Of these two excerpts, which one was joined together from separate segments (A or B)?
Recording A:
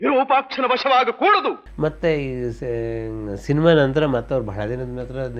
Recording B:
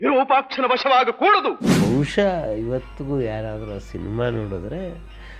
B